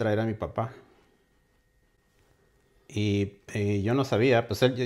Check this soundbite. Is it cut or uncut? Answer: uncut